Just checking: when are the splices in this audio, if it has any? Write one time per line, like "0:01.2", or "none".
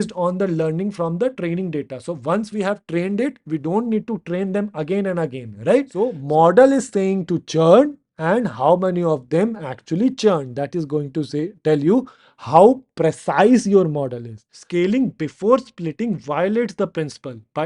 0:06.2
0:14.6